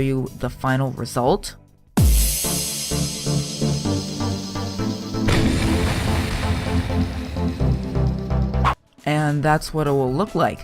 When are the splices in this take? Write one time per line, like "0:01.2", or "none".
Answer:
none